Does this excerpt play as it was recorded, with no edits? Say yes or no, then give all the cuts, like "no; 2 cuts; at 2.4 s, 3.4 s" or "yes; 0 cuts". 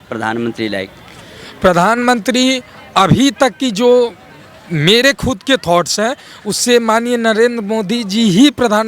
yes; 0 cuts